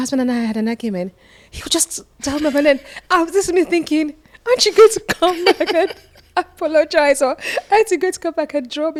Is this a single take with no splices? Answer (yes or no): yes